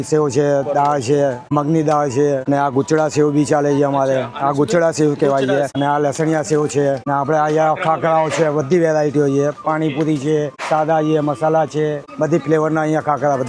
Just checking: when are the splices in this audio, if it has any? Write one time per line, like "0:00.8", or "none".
0:01.4
0:02.4
0:05.7
0:07.0
0:10.6
0:12.0